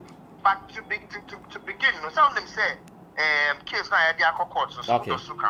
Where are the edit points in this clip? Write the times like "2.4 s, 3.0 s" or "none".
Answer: none